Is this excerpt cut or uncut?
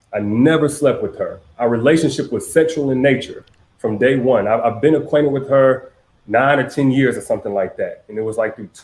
cut